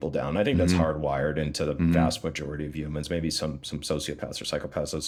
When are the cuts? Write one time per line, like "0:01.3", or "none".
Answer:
none